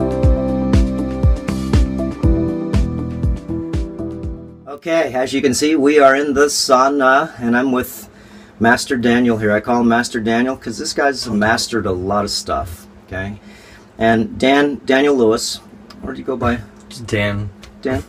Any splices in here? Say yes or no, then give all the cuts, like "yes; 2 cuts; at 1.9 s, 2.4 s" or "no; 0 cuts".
no; 0 cuts